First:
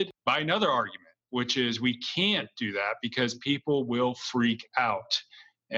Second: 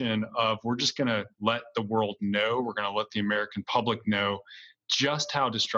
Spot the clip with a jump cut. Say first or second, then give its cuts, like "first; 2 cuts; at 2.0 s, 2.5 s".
second; 1 cut; at 1.3 s